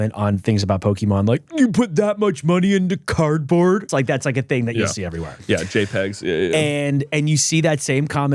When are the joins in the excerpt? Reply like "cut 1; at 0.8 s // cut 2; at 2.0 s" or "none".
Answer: cut 1; at 3.9 s // cut 2; at 7.1 s

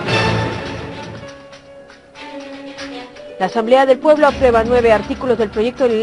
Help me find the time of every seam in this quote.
cut 1; at 1.1 s // cut 2; at 3.4 s

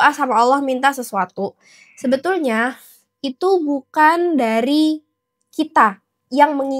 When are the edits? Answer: none

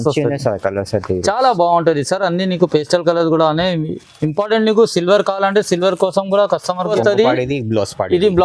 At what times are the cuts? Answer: cut 1; at 6.9 s

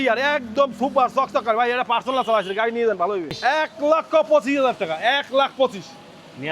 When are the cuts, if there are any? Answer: cut 1; at 3.5 s

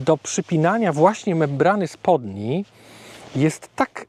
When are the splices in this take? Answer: none

